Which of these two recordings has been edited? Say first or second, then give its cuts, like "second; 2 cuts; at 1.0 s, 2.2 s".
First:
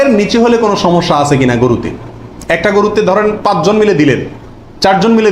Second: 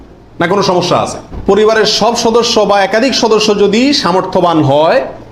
second; 1 cut; at 1.2 s